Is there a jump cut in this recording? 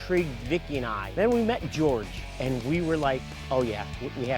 yes; 1 cut; at 1.0 s

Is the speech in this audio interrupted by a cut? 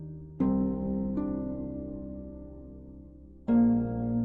no; 0 cuts

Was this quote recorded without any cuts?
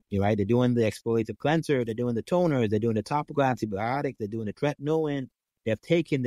yes; 0 cuts

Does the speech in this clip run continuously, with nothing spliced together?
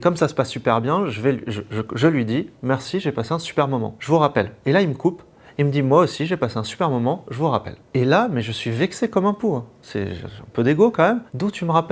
yes; 0 cuts

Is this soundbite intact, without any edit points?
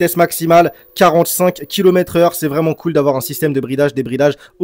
yes; 0 cuts

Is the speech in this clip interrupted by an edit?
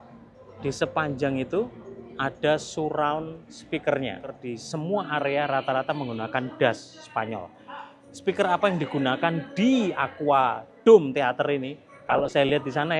yes; 1 cut; at 4.5 s

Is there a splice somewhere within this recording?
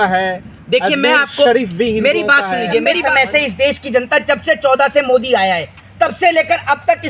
yes; 1 cut; at 3.0 s

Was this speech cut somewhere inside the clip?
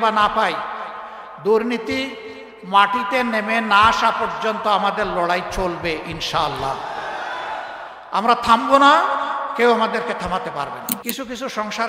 yes; 1 cut; at 10.9 s

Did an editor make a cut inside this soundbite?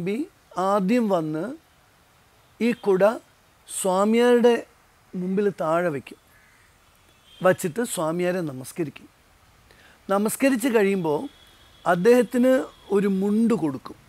no; 0 cuts

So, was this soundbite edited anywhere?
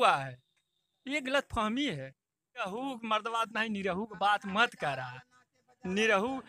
yes; 1 cut; at 2.7 s

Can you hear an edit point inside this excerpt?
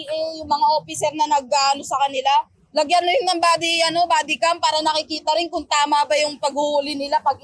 no; 0 cuts

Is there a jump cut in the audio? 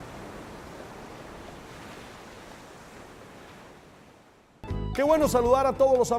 no; 0 cuts

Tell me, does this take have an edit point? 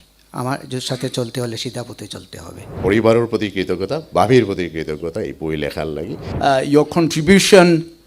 yes; 2 cuts; at 2.7 s, 6.3 s

